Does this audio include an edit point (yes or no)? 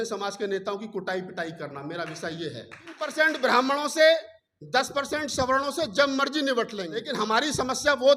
yes